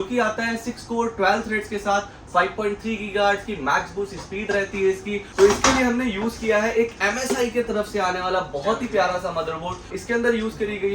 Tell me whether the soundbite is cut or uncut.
cut